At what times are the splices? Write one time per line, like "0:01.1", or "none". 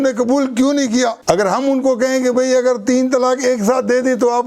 0:01.2